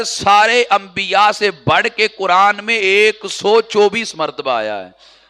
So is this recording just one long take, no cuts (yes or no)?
yes